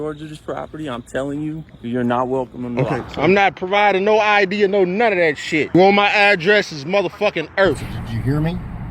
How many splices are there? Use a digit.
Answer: 3